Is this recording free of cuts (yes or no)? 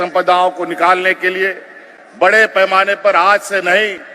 yes